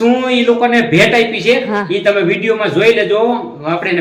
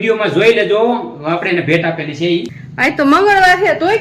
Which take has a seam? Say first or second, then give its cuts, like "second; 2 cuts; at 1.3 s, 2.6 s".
second; 1 cut; at 2.6 s